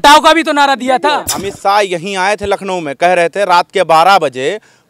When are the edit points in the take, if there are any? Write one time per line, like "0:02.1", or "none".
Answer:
0:01.3